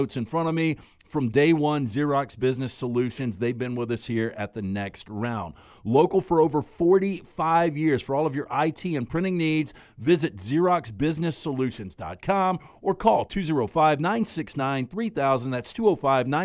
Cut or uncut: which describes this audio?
uncut